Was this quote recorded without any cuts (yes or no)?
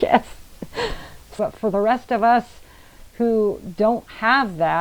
no